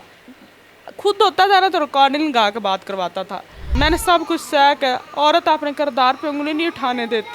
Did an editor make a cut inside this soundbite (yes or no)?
yes